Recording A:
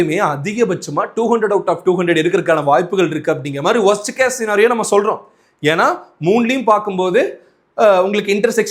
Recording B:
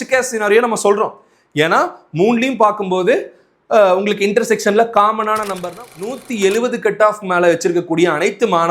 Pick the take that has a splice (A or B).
B